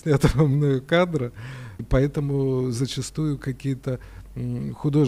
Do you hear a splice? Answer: yes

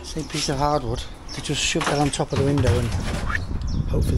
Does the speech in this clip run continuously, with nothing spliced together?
yes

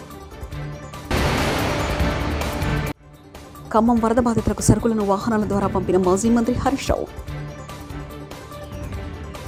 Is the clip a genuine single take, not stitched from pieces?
yes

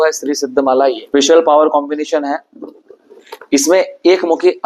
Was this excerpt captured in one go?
no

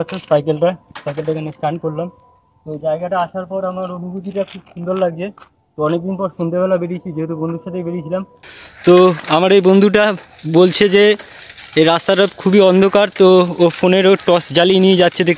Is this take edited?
yes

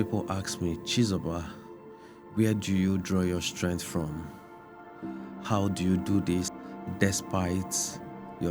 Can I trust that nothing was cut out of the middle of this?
no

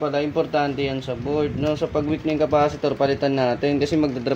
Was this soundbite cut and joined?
no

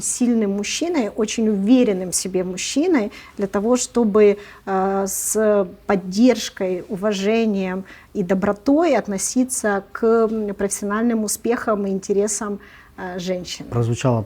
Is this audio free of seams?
yes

